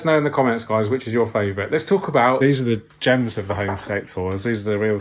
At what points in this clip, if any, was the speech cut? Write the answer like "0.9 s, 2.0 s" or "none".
2.4 s